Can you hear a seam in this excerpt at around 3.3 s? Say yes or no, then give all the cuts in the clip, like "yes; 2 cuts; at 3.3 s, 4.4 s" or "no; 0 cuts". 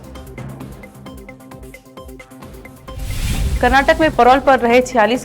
yes; 1 cut; at 3.3 s